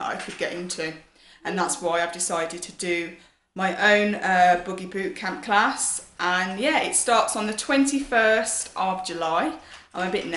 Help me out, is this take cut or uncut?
cut